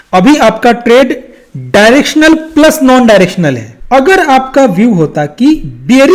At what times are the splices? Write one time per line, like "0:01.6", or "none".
none